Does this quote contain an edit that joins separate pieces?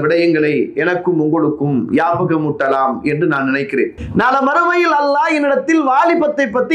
yes; 1 cut; at 3.9 s

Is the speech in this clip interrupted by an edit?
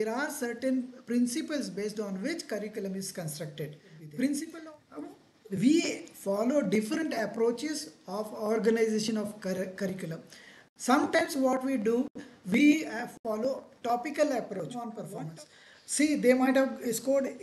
yes; 2 cuts; at 4.5 s, 15.0 s

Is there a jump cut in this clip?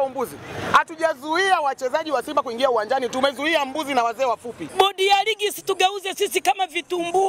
yes; 1 cut; at 4.6 s

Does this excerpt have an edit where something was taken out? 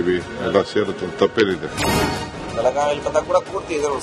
yes; 1 cut; at 1.6 s

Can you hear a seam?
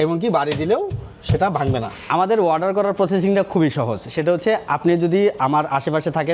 yes; 1 cut; at 2.0 s

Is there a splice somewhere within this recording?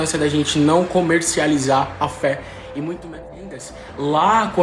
yes; 1 cut; at 3.6 s

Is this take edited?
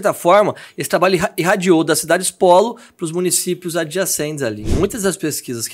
yes; 1 cut; at 4.7 s

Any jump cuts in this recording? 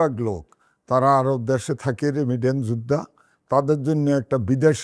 no; 0 cuts

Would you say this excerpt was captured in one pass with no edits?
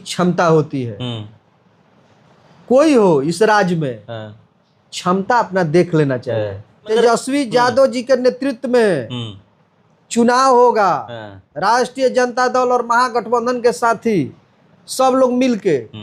no; 1 cut; at 6.9 s

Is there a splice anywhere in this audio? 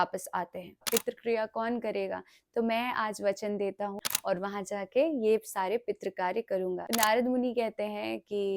yes; 3 cuts; at 0.8 s, 4.0 s, 6.8 s

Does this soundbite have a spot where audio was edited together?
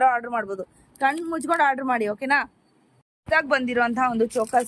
yes; 1 cut; at 3.1 s

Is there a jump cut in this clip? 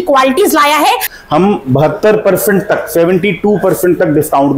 yes; 1 cut; at 1.1 s

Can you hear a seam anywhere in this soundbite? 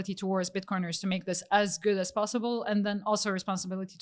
no; 0 cuts

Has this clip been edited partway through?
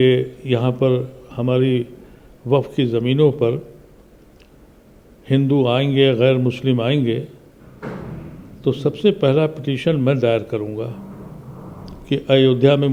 no; 0 cuts

